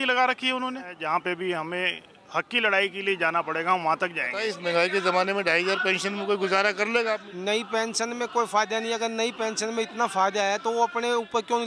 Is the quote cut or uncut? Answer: cut